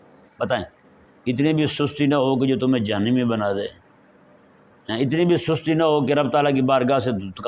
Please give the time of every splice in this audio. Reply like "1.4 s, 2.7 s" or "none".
1.1 s